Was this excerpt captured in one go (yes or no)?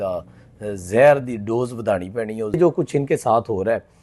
no